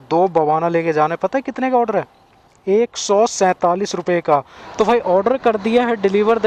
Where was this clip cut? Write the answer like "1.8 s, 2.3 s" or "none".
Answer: 4.7 s